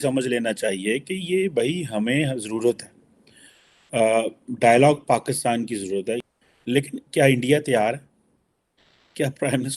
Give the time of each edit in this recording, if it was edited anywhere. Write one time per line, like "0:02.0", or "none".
0:06.2